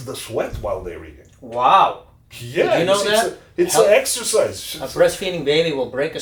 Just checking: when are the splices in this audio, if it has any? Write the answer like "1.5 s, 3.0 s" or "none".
none